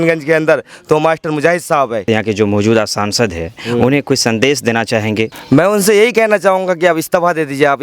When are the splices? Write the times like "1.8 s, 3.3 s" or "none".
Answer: 2.0 s, 5.4 s